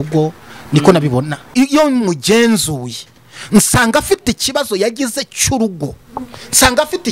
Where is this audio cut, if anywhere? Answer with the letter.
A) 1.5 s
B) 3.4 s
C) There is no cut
A